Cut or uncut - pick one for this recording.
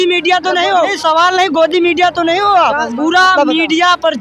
cut